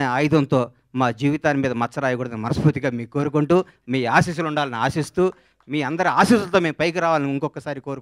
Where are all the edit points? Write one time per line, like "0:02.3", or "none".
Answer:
none